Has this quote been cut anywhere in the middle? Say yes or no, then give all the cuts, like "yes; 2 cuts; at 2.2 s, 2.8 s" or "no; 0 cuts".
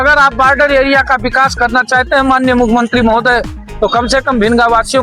no; 0 cuts